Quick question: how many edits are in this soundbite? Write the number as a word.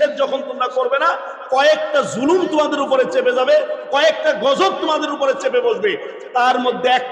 zero